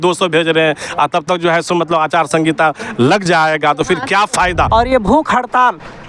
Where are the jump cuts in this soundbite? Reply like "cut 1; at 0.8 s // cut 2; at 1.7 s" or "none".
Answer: cut 1; at 4.7 s

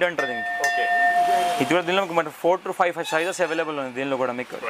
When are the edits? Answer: none

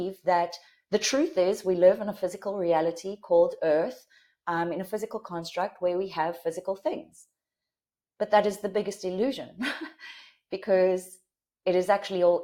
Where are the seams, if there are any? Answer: none

